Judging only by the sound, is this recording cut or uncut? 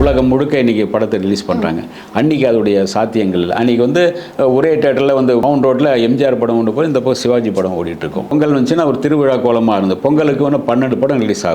cut